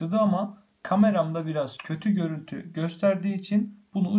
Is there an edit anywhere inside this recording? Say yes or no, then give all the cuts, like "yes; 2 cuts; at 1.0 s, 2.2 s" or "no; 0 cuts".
no; 0 cuts